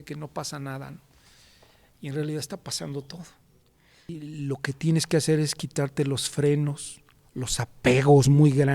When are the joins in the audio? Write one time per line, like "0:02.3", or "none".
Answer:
0:04.2